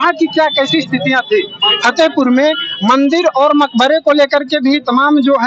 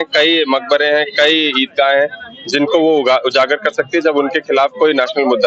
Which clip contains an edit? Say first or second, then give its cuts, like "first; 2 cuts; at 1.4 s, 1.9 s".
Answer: first; 1 cut; at 1.7 s